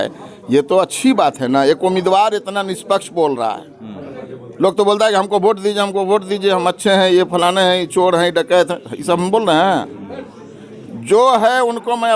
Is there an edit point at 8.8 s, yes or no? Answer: no